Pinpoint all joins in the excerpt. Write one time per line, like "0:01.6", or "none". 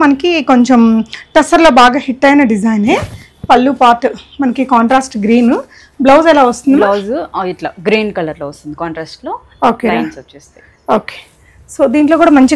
none